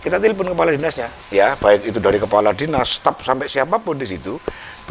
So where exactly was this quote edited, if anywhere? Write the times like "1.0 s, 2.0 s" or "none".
1.1 s